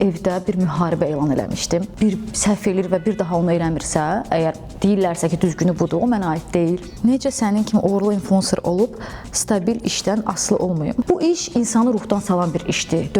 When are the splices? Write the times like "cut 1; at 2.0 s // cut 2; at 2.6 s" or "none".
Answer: cut 1; at 1.9 s // cut 2; at 6.9 s // cut 3; at 11.0 s